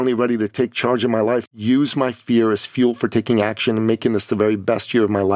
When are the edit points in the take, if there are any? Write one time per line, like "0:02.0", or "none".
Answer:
0:01.5